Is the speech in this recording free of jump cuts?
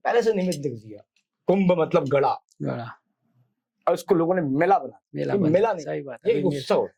yes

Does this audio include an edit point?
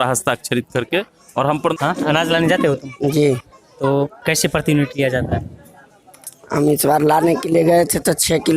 yes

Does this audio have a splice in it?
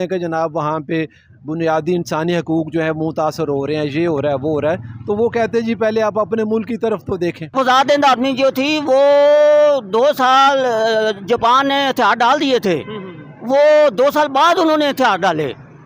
yes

